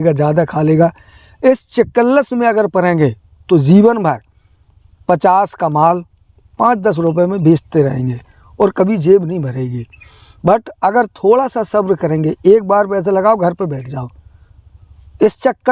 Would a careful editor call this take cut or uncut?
uncut